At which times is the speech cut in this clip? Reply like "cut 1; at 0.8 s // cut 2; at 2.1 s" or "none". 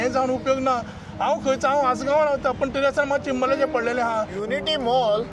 cut 1; at 4.4 s